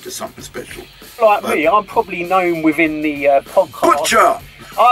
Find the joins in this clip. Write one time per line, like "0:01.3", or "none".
0:01.2